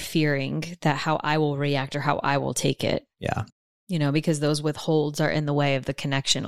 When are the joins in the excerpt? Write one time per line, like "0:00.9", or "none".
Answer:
none